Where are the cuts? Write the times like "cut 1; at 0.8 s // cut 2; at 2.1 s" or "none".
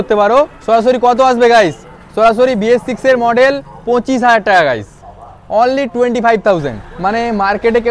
cut 1; at 6.8 s